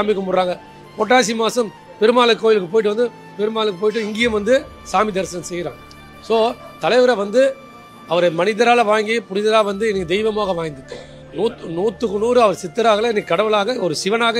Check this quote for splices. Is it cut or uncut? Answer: uncut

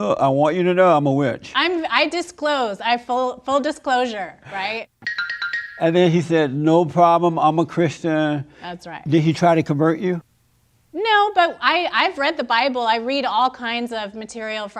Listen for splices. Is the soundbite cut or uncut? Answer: uncut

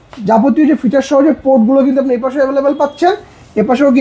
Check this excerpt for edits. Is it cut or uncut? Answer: uncut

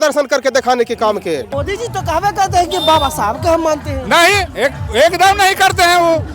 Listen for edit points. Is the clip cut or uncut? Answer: cut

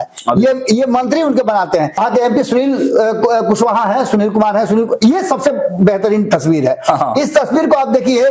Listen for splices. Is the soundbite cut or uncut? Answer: cut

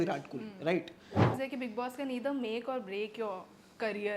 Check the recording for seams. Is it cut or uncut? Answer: cut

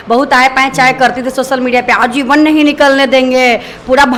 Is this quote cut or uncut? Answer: uncut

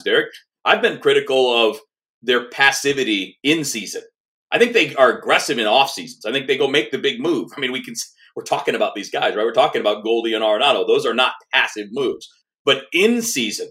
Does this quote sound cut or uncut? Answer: cut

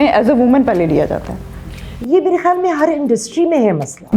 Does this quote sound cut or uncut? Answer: uncut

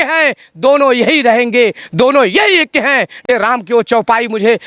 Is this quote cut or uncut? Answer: cut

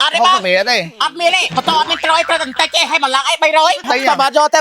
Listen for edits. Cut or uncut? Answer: cut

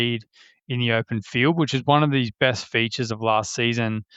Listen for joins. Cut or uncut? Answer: uncut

